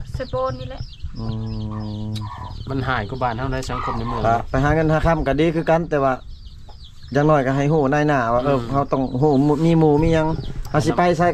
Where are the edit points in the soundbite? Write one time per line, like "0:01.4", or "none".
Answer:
none